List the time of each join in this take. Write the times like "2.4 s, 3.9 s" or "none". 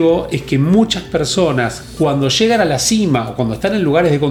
none